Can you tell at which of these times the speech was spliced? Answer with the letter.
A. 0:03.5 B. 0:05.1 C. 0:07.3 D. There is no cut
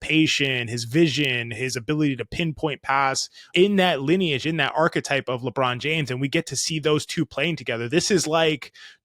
A